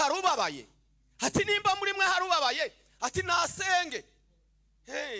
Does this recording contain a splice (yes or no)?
no